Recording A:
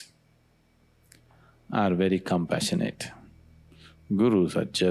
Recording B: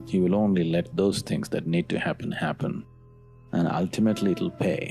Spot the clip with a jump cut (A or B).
B